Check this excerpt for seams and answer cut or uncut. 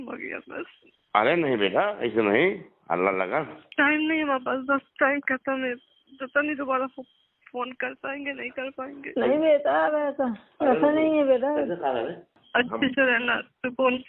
uncut